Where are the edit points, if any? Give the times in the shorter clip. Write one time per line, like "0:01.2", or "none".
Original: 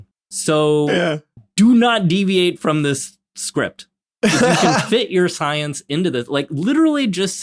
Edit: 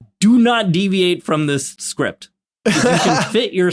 0:01.8